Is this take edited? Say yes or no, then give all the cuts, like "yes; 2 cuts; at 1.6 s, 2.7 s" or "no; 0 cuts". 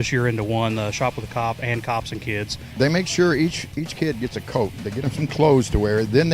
yes; 1 cut; at 2.6 s